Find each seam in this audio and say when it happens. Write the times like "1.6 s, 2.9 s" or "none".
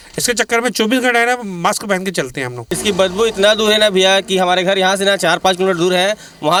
none